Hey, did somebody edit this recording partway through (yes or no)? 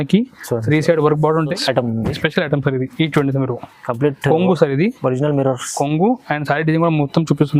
yes